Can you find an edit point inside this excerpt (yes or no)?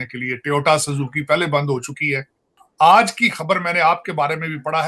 yes